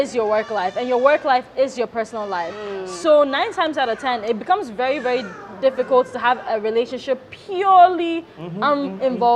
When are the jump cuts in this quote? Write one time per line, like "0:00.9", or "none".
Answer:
none